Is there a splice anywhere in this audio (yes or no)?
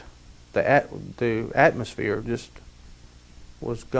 no